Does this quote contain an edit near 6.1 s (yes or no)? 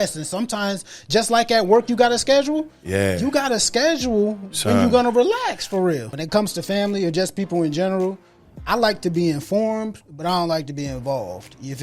yes